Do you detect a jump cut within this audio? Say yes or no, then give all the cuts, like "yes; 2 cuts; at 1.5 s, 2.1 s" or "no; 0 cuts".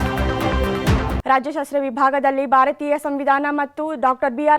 yes; 1 cut; at 1.2 s